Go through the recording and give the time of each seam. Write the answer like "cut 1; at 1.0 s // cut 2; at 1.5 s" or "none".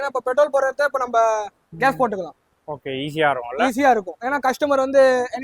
none